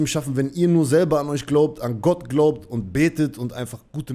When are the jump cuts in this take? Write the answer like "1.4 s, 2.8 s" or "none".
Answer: none